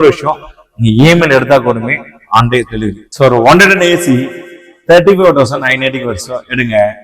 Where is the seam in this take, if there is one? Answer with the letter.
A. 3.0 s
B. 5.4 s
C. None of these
A